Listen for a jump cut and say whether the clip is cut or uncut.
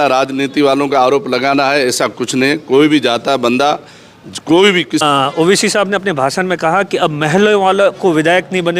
cut